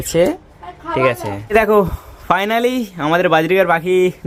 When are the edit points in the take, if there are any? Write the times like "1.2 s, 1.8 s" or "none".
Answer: none